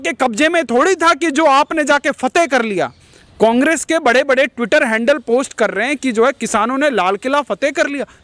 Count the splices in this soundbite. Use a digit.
0